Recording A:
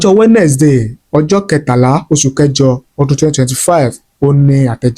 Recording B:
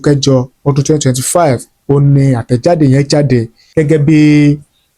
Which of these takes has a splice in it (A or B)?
B